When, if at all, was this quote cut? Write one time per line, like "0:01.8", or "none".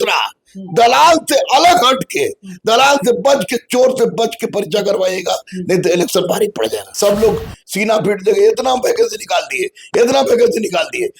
0:06.9